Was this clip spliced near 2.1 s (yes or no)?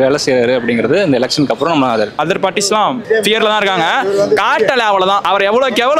yes